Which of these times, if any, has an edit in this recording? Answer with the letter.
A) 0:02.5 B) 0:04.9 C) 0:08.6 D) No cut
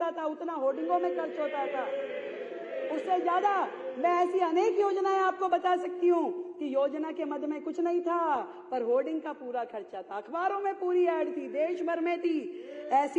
D